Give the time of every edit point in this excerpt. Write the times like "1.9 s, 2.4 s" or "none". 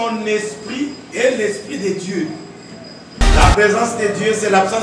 3.2 s